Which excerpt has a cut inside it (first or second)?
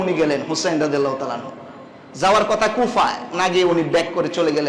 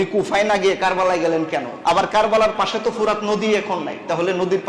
second